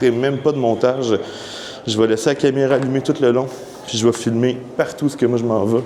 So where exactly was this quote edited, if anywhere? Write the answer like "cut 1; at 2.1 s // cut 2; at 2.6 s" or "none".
none